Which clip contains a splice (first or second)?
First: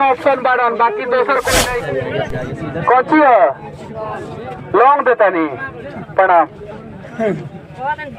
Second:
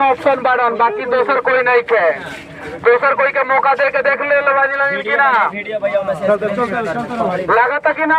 first